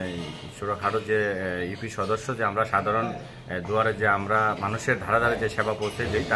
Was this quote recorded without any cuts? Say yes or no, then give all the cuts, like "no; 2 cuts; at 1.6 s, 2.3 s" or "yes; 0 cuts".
yes; 0 cuts